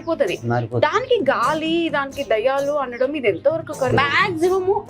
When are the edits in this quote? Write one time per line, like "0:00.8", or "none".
0:03.9

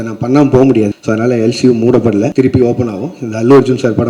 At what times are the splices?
0:00.9
0:02.3

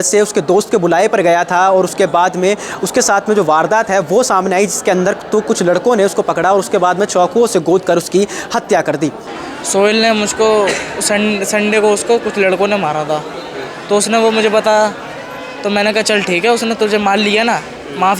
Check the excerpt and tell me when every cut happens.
0:09.3

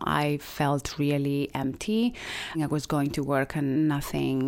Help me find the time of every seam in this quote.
0:02.6
0:03.8

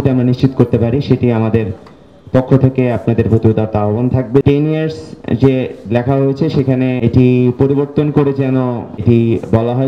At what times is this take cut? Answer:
0:04.4
0:07.0
0:08.9

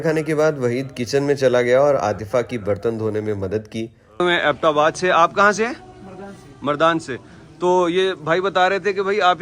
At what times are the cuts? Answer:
0:04.2

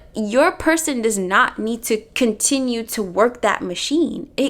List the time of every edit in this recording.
none

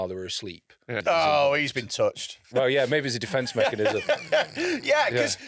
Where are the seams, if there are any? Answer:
0:00.9
0:02.4

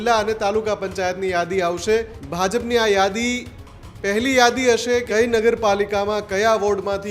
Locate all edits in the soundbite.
0:02.2
0:05.1

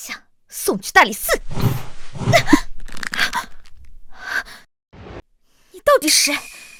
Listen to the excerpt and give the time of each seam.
none

